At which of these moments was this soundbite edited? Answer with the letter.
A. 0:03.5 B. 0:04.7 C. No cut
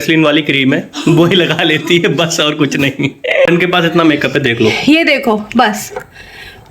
A